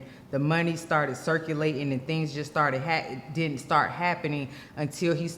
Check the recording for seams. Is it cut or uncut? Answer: uncut